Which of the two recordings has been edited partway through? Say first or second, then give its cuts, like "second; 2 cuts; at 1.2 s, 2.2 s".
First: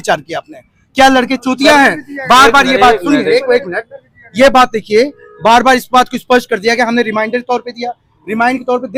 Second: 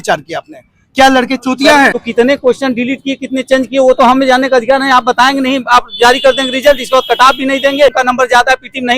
second; 2 cuts; at 2.0 s, 8.0 s